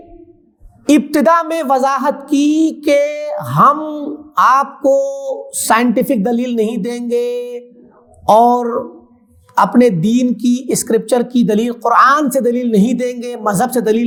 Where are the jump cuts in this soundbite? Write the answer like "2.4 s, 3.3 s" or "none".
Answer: none